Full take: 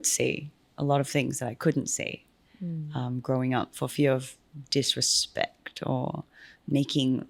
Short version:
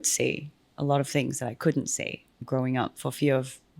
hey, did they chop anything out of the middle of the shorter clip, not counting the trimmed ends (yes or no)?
yes